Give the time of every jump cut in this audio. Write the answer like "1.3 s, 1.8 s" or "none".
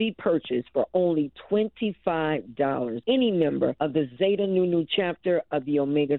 none